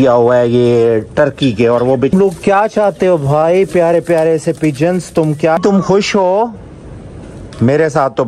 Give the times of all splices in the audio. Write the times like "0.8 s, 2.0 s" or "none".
2.1 s, 5.6 s